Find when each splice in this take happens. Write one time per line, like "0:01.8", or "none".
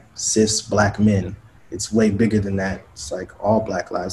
none